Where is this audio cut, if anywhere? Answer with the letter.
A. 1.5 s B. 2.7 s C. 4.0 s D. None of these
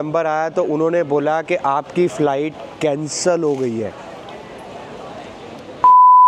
D